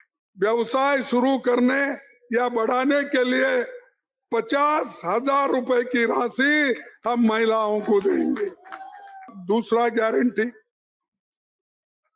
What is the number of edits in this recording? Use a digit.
1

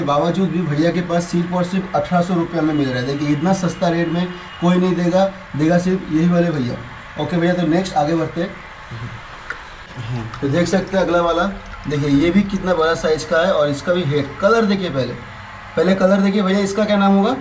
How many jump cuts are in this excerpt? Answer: 0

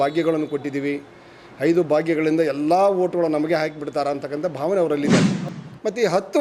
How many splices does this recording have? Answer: 1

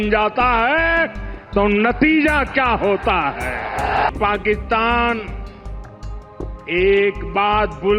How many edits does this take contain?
3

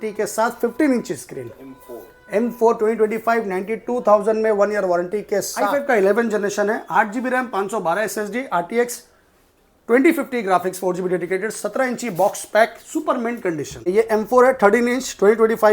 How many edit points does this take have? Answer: 2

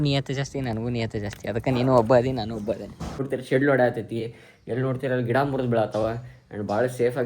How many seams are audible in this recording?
1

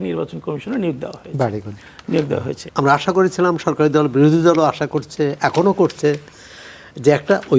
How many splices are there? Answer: 1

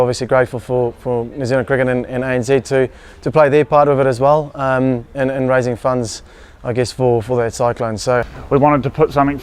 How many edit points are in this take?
1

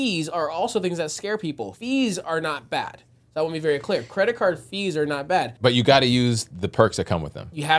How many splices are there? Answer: 2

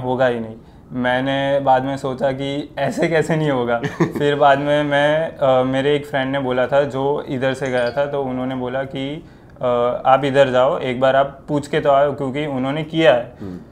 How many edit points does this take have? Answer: 0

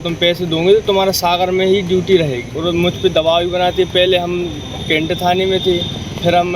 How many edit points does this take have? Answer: 1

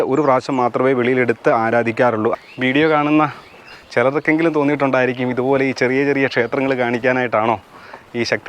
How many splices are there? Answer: 1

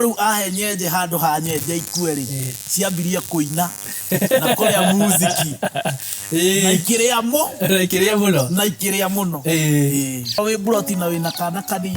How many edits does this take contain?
1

